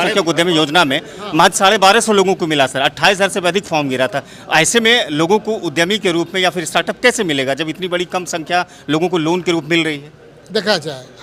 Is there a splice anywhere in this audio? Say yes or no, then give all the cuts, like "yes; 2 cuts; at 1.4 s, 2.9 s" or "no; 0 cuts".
no; 0 cuts